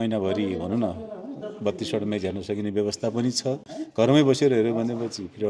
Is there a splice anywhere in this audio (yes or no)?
no